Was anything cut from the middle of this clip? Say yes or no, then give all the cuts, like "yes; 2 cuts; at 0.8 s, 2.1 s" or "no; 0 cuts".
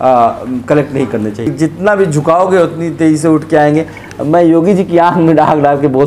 yes; 1 cut; at 1.5 s